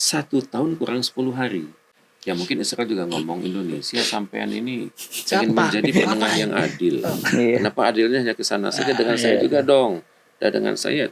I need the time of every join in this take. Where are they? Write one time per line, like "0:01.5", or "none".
0:01.8